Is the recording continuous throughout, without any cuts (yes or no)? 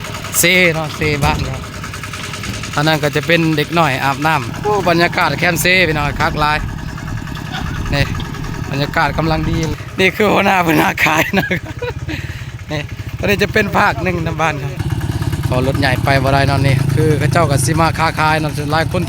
no